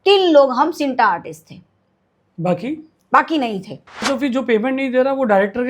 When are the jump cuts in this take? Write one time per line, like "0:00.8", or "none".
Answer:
0:04.0